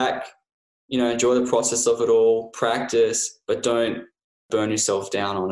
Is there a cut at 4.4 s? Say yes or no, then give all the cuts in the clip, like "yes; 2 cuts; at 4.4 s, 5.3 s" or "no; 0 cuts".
yes; 1 cut; at 4.4 s